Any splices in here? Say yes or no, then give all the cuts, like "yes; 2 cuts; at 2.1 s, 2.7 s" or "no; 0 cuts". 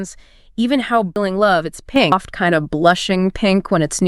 yes; 2 cuts; at 1.2 s, 2.1 s